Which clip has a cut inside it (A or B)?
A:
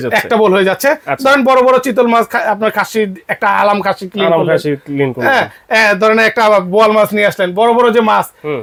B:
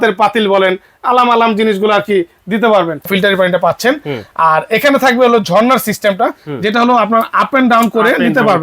B